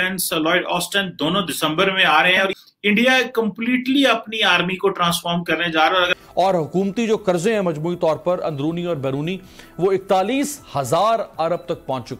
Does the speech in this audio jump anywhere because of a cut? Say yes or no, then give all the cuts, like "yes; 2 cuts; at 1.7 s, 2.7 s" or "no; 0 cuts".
yes; 2 cuts; at 2.6 s, 6.1 s